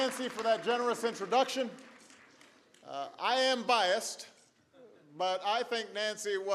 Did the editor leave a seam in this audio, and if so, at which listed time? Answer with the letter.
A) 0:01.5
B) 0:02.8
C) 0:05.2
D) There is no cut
D